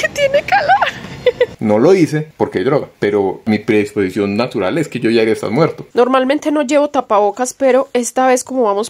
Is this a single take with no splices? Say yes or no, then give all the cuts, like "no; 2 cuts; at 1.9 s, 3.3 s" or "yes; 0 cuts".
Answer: no; 3 cuts; at 1.6 s, 3.4 s, 5.8 s